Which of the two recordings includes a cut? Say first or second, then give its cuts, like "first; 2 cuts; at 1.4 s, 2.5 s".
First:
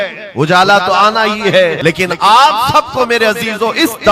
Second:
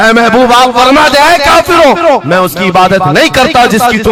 first; 1 cut; at 1.8 s